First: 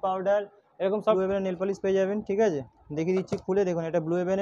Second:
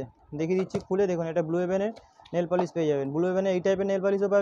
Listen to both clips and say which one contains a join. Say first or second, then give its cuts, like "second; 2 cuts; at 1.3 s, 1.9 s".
first; 1 cut; at 1.2 s